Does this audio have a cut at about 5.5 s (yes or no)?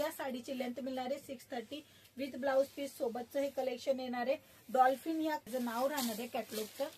yes